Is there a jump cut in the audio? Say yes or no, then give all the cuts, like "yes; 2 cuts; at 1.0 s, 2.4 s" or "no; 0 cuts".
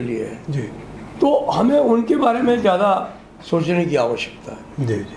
no; 0 cuts